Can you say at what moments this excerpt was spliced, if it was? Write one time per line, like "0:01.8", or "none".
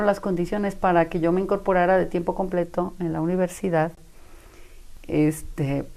none